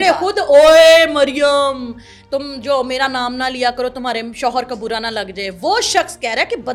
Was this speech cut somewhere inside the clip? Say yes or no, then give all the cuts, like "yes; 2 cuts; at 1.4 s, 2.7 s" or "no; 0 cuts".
no; 0 cuts